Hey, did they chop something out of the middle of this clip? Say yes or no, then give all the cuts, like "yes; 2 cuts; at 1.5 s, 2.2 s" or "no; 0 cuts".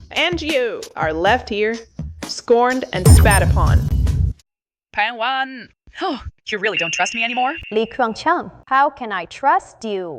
yes; 1 cut; at 4.4 s